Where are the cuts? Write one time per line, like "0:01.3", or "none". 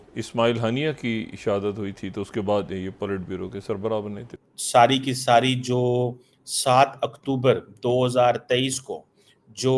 0:04.3